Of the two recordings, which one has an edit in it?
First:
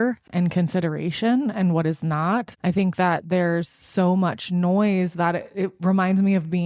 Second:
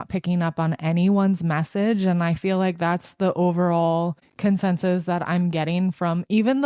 first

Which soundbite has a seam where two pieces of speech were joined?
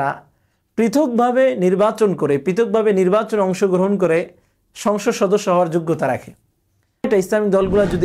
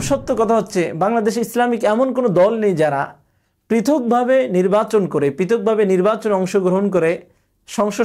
first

